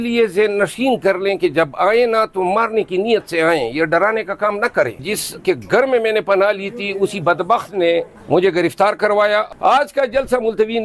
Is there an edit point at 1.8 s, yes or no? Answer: no